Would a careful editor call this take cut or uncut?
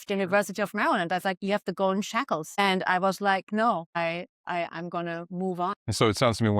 cut